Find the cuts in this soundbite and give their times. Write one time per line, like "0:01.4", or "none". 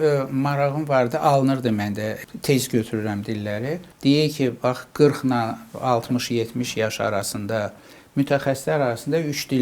0:03.8